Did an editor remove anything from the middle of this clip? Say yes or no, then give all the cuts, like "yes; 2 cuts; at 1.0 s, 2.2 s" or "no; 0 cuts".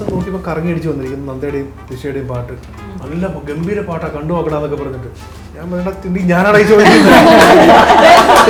no; 0 cuts